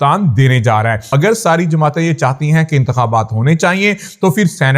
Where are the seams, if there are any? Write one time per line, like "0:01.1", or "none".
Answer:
0:01.1